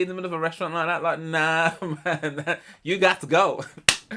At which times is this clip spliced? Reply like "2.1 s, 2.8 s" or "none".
none

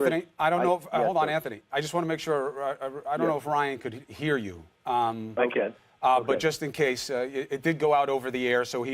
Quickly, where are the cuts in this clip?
none

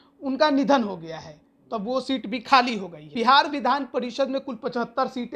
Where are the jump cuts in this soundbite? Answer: 3.1 s

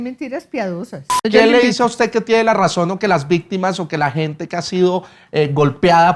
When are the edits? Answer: 1.2 s

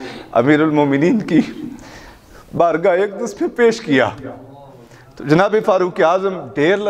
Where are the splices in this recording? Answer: none

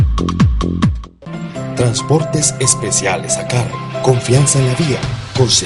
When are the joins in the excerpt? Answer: 1.0 s

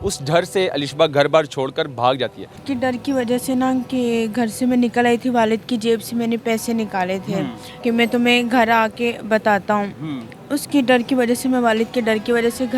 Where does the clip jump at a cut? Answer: 2.6 s, 7.6 s

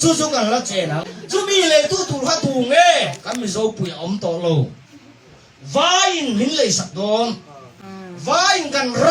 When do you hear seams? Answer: 1.1 s

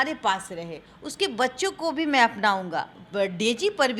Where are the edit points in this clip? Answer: 3.0 s

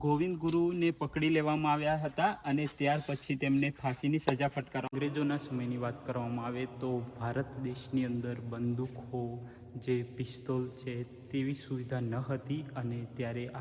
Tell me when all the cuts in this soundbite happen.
4.9 s

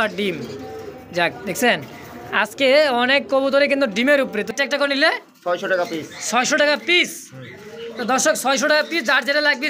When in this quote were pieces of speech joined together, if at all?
4.5 s

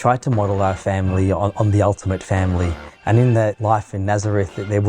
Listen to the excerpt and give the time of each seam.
2.9 s, 3.6 s

